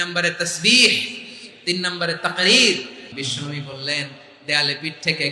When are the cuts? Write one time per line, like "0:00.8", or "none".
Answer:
0:03.2